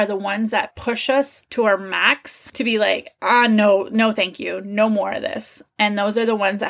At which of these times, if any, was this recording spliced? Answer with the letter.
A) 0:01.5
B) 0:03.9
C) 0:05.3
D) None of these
D